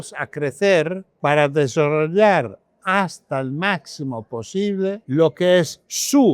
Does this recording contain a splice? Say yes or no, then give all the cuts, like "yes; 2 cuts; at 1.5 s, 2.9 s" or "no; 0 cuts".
yes; 2 cuts; at 1.0 s, 5.0 s